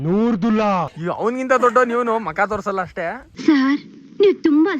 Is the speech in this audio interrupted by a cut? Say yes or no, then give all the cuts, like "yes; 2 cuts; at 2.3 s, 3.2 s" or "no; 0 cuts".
yes; 1 cut; at 0.9 s